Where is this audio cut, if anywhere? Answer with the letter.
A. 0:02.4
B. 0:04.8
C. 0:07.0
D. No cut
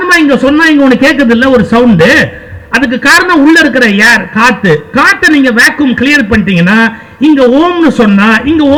D